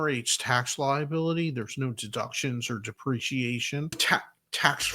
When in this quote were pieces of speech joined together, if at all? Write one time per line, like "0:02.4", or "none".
0:04.0